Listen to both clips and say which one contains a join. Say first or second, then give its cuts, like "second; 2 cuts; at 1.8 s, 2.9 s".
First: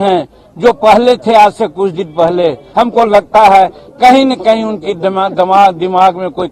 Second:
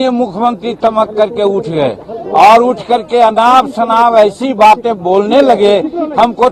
first; 1 cut; at 2.6 s